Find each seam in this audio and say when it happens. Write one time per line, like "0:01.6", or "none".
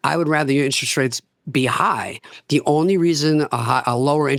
none

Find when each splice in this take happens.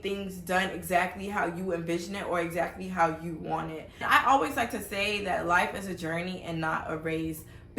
0:04.0

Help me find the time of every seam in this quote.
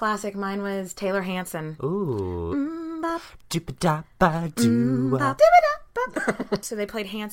0:01.7
0:05.3
0:06.2

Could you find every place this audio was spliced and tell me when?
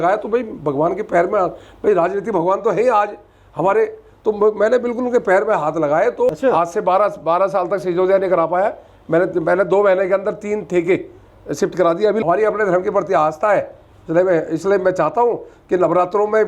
0:06.3
0:12.2

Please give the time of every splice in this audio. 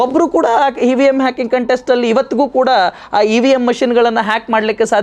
none

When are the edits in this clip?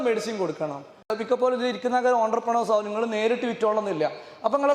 0:01.1

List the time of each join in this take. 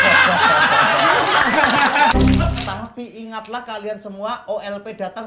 0:02.1

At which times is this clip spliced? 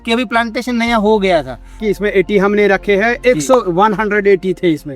0:01.8

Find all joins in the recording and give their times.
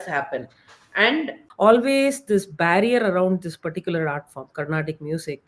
0:01.4

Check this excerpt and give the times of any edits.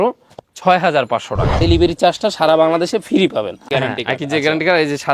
0:01.6
0:03.6

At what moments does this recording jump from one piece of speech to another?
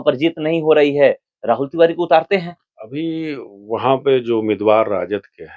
none

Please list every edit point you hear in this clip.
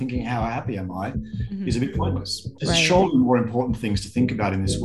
0:02.5

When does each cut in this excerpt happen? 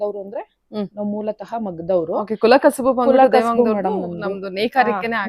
none

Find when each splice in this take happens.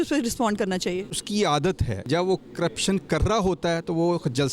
0:01.2
0:02.0

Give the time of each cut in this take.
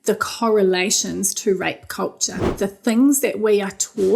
0:02.5

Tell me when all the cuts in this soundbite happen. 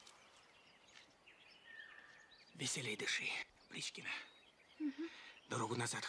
0:03.2

